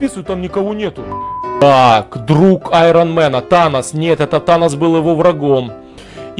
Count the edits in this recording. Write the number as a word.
one